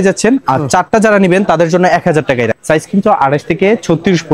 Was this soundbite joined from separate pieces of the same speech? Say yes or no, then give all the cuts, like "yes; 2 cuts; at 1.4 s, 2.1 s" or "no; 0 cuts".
yes; 1 cut; at 2.6 s